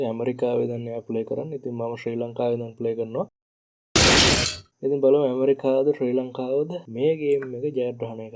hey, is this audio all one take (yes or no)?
yes